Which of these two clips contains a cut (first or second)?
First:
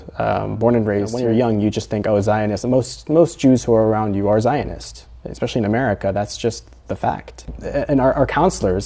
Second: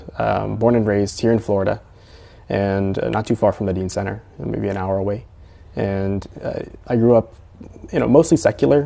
first